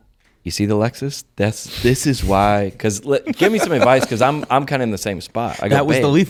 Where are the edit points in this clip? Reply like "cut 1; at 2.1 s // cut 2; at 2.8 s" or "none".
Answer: none